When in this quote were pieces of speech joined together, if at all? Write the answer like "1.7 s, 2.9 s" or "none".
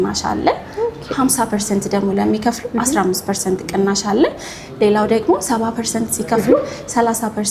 none